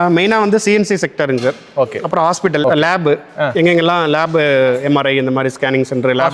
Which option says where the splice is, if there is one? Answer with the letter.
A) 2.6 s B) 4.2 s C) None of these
A